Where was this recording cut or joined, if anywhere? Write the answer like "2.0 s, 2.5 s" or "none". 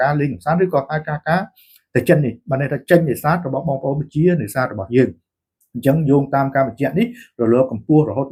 none